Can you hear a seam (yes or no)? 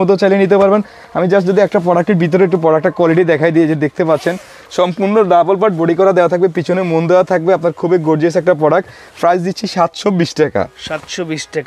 no